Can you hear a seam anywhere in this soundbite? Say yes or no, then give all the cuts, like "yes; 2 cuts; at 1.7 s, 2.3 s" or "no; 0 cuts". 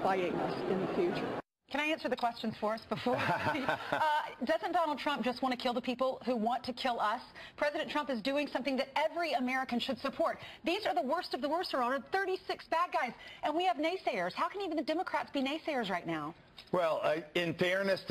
no; 0 cuts